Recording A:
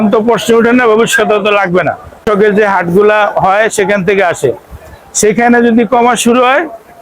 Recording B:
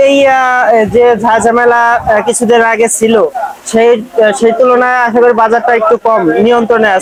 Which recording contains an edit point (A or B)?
A